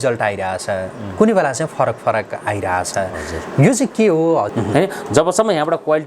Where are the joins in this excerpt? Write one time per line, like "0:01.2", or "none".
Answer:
0:04.5